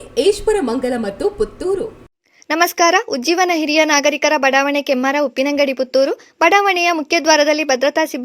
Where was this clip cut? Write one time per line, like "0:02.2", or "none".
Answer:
0:02.1

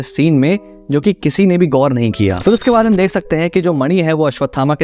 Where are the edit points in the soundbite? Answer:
0:02.4

